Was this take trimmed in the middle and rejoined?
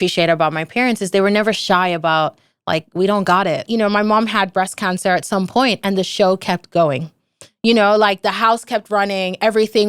yes; 1 cut; at 3.6 s

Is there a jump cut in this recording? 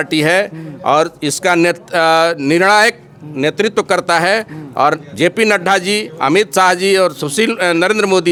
no; 0 cuts

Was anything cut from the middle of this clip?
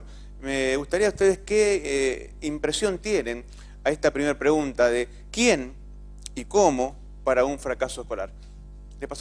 yes; 1 cut; at 8.1 s

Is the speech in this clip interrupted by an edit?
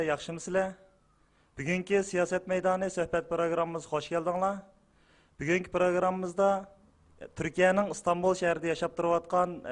no; 0 cuts

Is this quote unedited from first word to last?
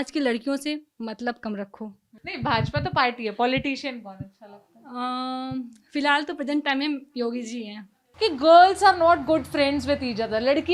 no; 2 cuts; at 2.1 s, 8.0 s

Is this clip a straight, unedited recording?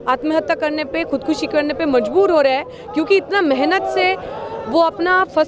yes; 0 cuts

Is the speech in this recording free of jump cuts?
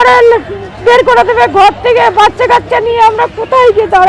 yes; 0 cuts

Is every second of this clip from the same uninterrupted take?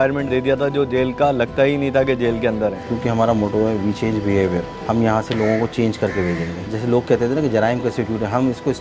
no; 2 cuts; at 2.8 s, 6.7 s

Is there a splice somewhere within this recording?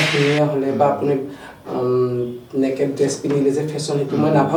no; 0 cuts

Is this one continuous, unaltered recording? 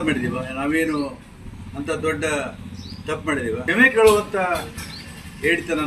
no; 1 cut; at 3.6 s

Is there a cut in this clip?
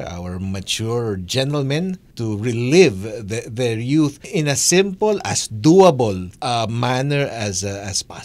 yes; 3 cuts; at 2.1 s, 4.2 s, 6.3 s

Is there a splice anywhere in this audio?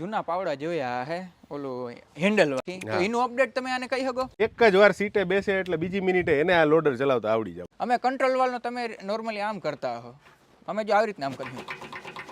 yes; 3 cuts; at 2.6 s, 4.3 s, 7.6 s

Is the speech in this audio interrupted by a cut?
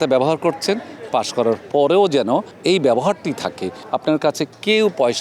no; 0 cuts

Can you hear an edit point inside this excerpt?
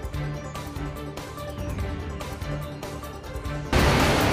no; 0 cuts

